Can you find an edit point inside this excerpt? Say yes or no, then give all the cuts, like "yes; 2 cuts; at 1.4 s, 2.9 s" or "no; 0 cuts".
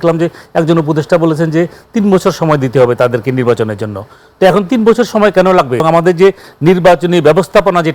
yes; 1 cut; at 5.8 s